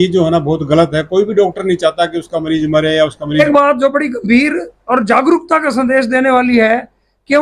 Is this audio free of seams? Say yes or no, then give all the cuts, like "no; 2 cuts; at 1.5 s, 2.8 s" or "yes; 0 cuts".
no; 1 cut; at 3.4 s